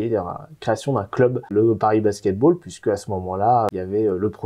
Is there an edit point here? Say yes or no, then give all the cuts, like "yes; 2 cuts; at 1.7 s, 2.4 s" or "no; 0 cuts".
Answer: yes; 2 cuts; at 1.5 s, 3.7 s